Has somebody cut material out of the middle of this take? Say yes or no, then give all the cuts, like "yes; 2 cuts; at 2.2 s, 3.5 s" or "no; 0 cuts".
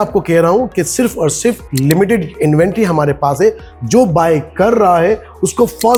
no; 0 cuts